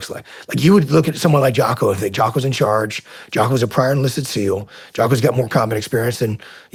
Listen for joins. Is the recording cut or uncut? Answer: uncut